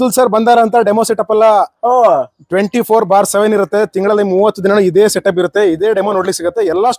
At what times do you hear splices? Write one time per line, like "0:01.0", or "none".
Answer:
none